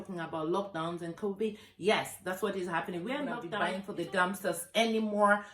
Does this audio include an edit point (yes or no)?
yes